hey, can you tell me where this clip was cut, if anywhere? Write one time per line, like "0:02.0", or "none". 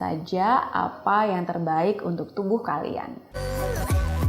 0:03.4